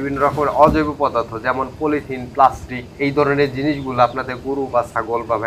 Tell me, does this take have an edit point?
no; 0 cuts

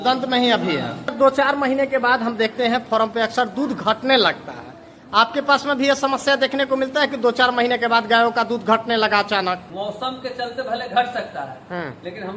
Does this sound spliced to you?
yes; 2 cuts; at 1.0 s, 9.7 s

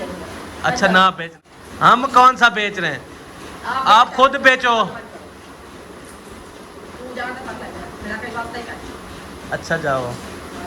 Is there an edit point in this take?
yes; 1 cut; at 1.3 s

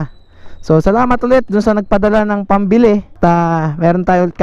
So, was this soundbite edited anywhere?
no; 0 cuts

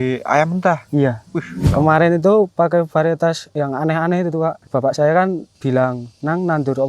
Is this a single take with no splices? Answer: no; 4 cuts; at 1.6 s, 3.4 s, 4.6 s, 5.6 s

